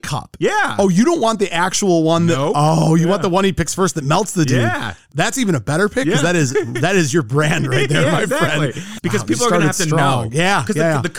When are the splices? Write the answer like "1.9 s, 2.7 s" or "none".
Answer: 5.1 s, 8.8 s